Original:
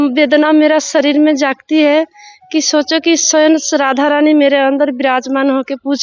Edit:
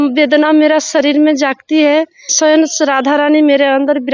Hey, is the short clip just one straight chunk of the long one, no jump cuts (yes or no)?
no